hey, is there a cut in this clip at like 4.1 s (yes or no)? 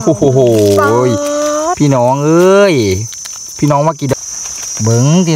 yes